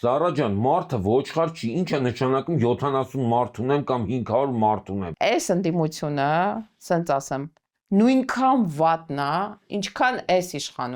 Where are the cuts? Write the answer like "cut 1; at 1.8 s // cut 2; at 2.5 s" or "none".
cut 1; at 5.1 s